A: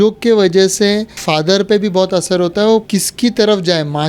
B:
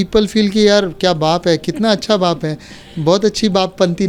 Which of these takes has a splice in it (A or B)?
A